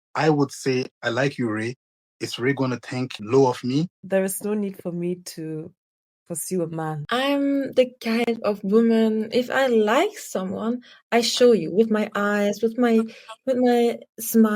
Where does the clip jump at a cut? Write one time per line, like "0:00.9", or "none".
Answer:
0:03.2
0:04.0
0:07.0